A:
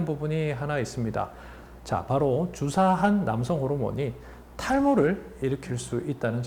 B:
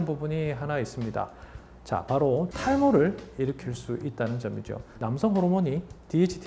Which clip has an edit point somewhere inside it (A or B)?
B